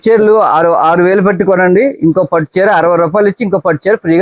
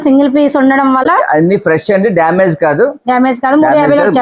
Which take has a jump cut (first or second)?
second